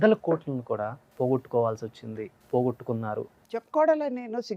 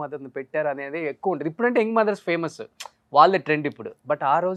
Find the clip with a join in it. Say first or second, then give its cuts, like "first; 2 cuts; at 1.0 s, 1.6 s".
first; 3 cuts; at 1.0 s, 2.3 s, 3.3 s